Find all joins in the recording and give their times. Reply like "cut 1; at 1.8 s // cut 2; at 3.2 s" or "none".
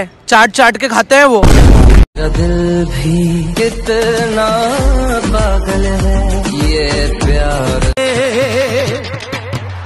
cut 1; at 2.0 s